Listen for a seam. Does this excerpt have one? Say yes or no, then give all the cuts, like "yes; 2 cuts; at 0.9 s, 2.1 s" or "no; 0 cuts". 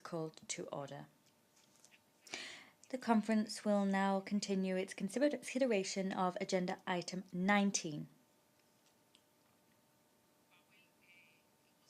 yes; 1 cut; at 2.7 s